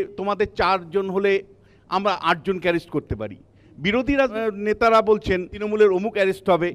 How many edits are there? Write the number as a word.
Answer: three